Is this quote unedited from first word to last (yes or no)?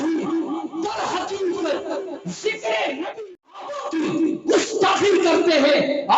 no